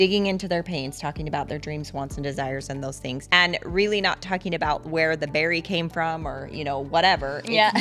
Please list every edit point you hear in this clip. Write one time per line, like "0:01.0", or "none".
none